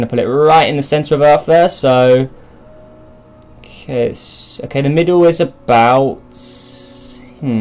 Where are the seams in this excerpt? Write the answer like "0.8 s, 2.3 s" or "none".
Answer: none

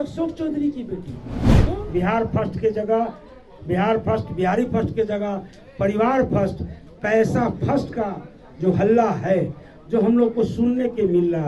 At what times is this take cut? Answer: 1.5 s

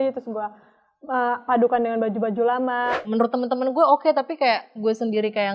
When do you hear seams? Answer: 3.0 s

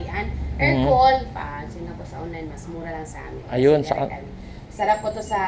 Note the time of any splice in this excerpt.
none

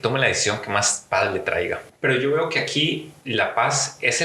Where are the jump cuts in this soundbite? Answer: 1.9 s

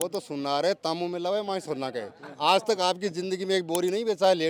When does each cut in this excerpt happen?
none

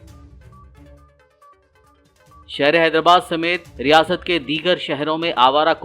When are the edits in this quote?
0.9 s

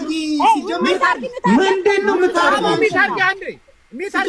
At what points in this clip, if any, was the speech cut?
none

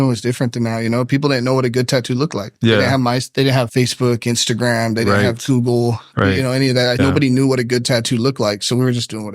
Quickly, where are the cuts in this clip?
3.7 s, 7.0 s

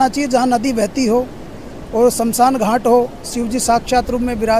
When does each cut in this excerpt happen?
none

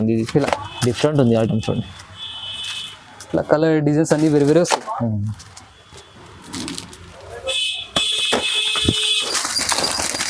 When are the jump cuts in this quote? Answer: none

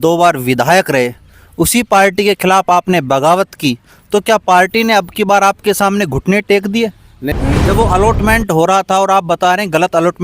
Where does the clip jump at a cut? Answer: 7.4 s

